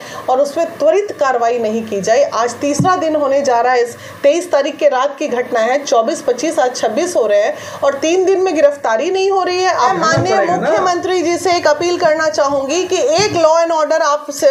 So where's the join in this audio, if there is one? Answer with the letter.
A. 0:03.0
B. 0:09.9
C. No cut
B